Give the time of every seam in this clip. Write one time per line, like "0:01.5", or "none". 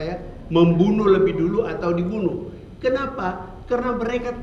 none